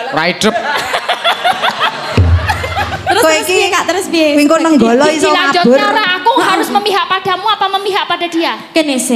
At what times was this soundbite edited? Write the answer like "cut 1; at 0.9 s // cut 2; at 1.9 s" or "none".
none

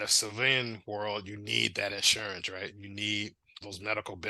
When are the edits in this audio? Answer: none

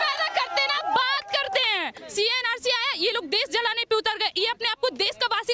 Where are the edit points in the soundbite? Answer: cut 1; at 2.0 s

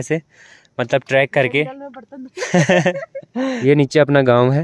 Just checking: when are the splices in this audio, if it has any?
cut 1; at 3.6 s

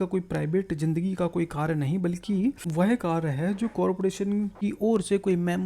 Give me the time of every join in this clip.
cut 1; at 2.6 s // cut 2; at 4.5 s

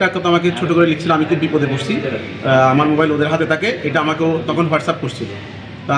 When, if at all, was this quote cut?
none

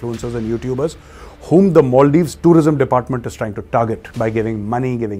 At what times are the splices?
cut 1; at 4.1 s

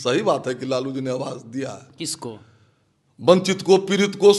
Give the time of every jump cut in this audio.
none

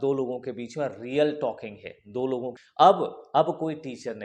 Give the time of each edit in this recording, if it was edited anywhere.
cut 1; at 2.6 s

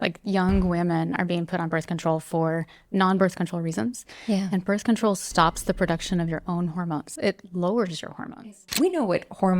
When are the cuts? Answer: cut 1; at 7.1 s // cut 2; at 8.6 s

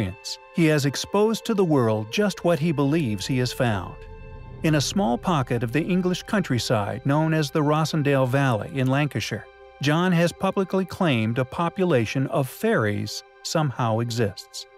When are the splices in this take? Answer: none

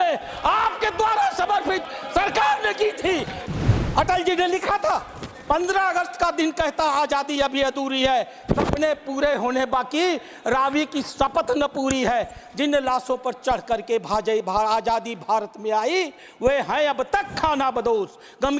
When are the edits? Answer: cut 1; at 3.4 s

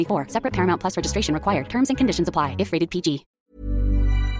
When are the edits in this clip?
cut 1; at 3.3 s

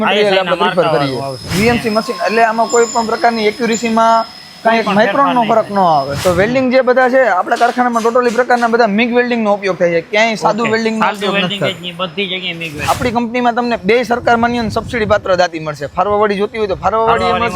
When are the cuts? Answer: cut 1; at 1.4 s // cut 2; at 6.1 s // cut 3; at 12.7 s

